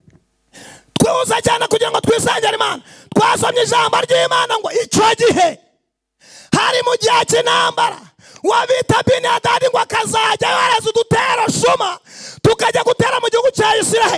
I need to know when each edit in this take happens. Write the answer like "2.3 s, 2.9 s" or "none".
none